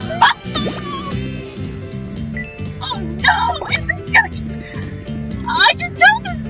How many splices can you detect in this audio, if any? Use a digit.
0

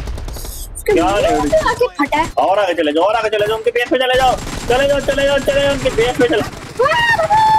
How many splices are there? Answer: 1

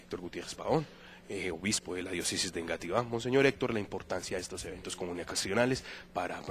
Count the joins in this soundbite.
1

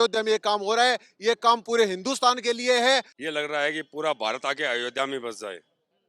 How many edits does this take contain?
1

